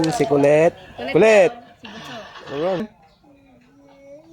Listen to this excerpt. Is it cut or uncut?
cut